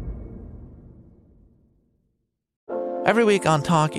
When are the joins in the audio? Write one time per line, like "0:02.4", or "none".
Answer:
0:02.6